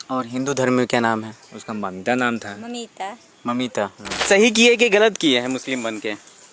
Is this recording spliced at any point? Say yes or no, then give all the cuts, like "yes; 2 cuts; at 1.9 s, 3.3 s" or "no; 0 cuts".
yes; 1 cut; at 4.3 s